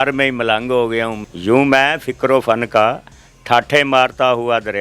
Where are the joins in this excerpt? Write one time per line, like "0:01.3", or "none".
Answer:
0:01.3